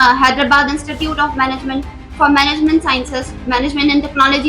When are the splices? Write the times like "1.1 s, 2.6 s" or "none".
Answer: none